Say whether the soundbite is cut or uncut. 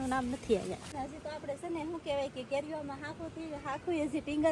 cut